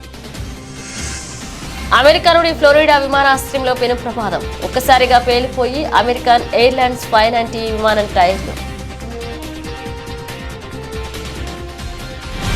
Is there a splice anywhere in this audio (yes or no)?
no